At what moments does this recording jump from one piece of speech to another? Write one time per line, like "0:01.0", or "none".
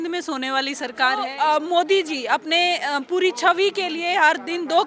0:01.3